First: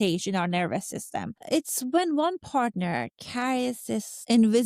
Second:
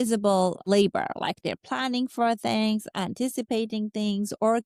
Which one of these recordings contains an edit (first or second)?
first